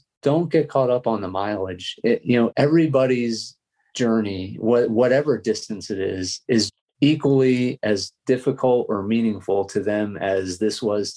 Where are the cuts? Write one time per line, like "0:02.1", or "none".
0:02.5

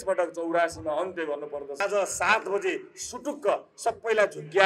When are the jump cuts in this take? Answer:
0:01.8

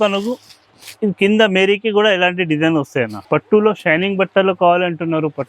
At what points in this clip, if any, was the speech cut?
0:03.2

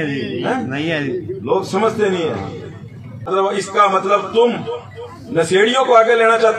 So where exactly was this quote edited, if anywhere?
0:03.3

